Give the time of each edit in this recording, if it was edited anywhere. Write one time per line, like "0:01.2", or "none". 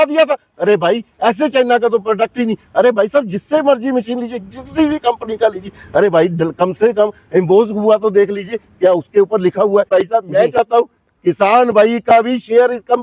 0:09.9